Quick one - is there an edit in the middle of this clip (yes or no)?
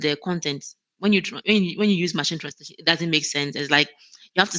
no